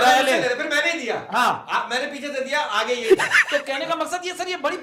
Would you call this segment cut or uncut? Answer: uncut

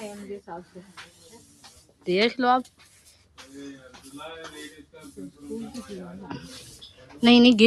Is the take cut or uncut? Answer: uncut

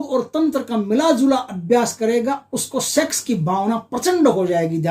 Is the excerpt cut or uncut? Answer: uncut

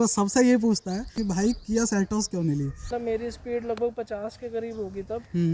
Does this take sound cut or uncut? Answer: cut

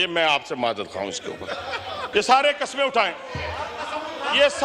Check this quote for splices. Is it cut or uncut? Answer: cut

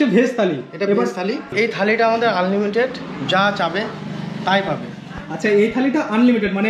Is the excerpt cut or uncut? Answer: cut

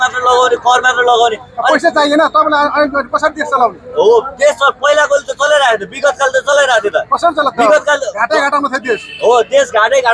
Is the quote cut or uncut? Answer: uncut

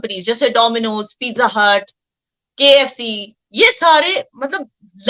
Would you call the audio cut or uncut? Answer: uncut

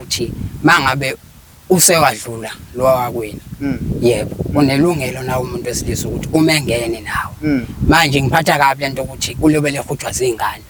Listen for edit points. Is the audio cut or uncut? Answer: uncut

